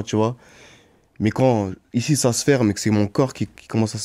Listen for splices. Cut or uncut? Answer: uncut